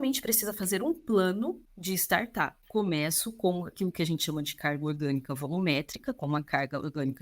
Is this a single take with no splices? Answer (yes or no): no